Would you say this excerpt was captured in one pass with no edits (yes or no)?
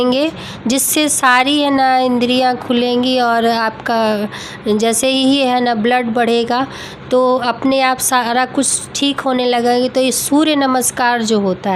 yes